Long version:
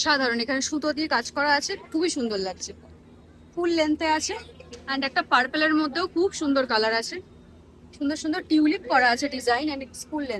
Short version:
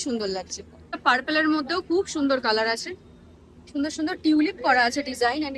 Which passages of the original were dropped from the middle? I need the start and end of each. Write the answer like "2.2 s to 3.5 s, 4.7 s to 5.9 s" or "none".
3.0 s to 5.2 s